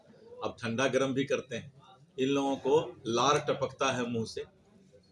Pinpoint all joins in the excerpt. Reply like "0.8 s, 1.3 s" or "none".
none